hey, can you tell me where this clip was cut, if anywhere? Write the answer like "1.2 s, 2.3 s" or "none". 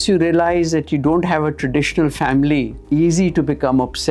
2.8 s